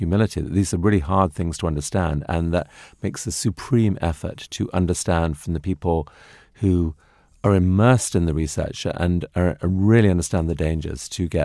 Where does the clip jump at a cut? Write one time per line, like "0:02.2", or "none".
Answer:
none